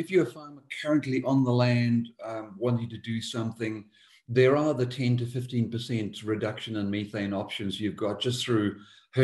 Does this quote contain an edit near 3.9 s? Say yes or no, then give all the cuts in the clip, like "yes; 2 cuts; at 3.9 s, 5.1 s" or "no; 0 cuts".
no; 0 cuts